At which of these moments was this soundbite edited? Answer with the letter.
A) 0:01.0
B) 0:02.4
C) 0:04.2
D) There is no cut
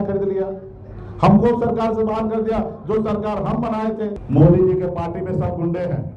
C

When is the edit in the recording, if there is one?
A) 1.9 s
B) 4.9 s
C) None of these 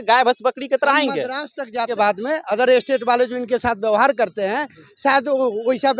A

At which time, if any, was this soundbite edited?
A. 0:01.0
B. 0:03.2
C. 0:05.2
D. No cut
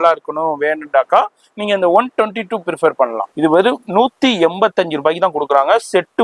B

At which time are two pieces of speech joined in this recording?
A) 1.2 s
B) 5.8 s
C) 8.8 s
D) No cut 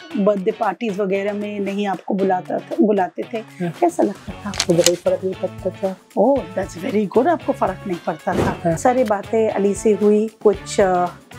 C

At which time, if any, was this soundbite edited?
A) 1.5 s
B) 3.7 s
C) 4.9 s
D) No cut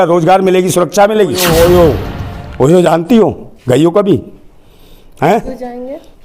A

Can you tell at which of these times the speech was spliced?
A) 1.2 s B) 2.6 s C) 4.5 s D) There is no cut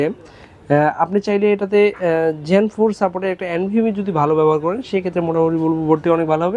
D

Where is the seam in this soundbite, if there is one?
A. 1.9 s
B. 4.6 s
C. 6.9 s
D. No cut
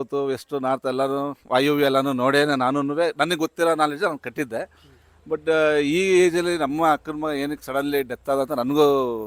D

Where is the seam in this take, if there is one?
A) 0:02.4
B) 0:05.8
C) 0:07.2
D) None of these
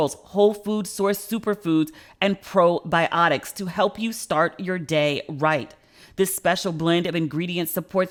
D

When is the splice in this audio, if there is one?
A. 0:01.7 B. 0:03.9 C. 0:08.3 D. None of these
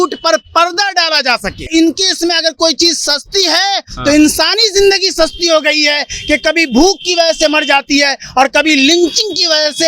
A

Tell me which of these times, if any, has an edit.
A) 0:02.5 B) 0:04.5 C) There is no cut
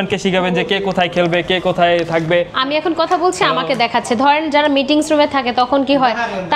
A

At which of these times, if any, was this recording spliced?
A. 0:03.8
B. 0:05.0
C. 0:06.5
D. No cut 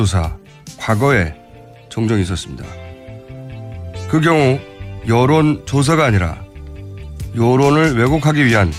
D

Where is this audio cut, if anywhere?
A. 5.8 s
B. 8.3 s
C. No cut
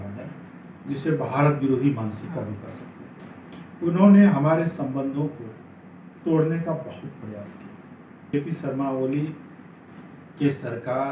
B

